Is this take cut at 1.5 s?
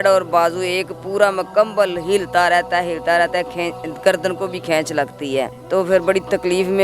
no; 1 cut; at 5.6 s

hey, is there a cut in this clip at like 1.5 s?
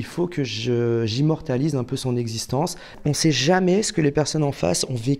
no; 1 cut; at 2.9 s

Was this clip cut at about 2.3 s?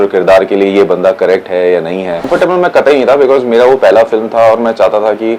yes; 1 cut; at 2.3 s

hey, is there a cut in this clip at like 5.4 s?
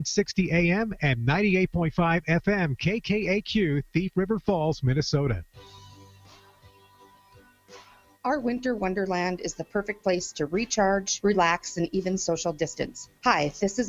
yes; 1 cut; at 5.4 s

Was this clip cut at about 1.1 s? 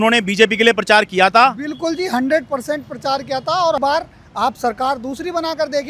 no; 1 cut; at 3.8 s

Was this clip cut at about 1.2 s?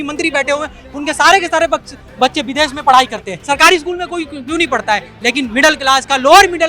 no; 1 cut; at 3.3 s

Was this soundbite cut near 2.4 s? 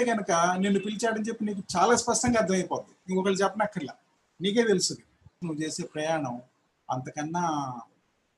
no; 1 cut; at 5.4 s

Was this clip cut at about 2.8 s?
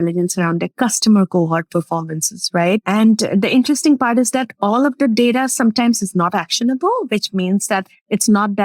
yes; 1 cut; at 2.8 s

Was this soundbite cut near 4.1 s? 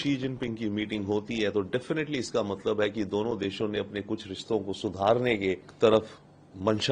no; 1 cut; at 5.7 s

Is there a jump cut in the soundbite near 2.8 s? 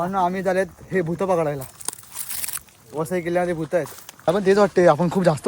no; 1 cut; at 4.3 s

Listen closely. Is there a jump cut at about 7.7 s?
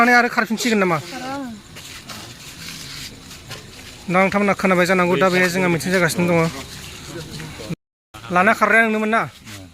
yes; 1 cut; at 7.7 s

